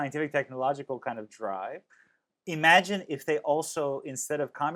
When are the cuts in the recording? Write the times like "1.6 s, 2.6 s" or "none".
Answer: none